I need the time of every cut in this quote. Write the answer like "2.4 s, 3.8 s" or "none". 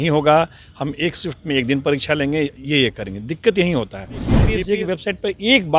4.5 s